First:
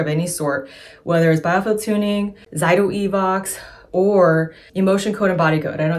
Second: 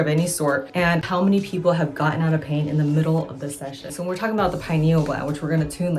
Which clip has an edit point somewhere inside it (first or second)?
second